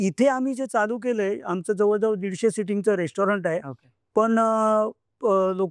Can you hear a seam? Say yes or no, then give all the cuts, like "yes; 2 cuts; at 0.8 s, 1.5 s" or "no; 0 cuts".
no; 0 cuts